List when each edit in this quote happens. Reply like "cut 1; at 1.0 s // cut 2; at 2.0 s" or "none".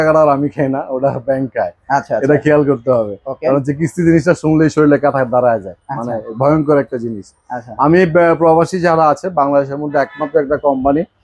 none